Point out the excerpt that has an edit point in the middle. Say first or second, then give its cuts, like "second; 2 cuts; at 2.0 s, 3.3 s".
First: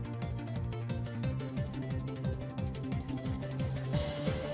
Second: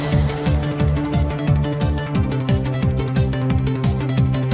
first; 1 cut; at 2.5 s